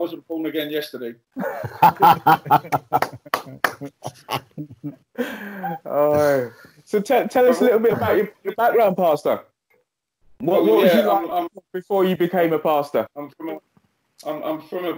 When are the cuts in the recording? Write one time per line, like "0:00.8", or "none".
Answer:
none

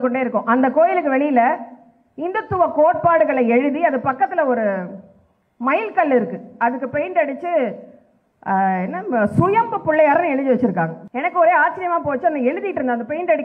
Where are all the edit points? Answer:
0:11.0

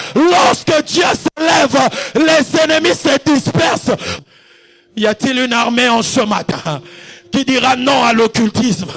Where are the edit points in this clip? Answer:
0:04.1

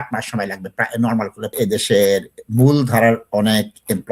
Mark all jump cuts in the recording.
0:01.5

